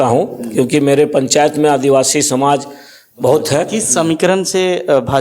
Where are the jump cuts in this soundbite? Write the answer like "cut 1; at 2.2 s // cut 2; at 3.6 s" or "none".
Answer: cut 1; at 3.8 s